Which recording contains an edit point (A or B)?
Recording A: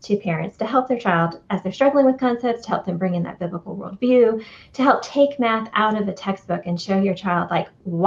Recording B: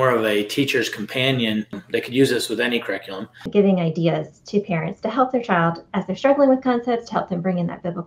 B